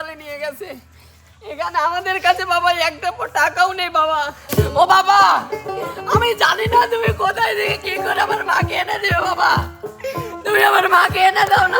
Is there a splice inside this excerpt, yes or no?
yes